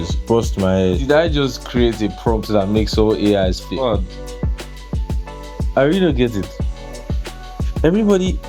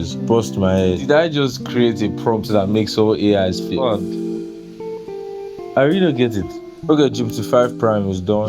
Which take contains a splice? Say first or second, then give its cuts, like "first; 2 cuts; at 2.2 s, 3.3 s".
second; 1 cut; at 6.8 s